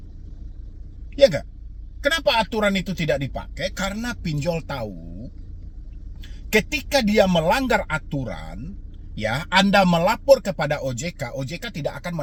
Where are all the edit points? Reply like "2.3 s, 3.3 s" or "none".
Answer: none